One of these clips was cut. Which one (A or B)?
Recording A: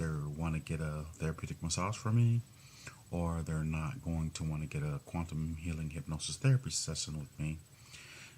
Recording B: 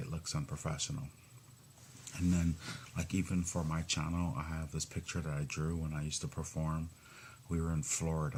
A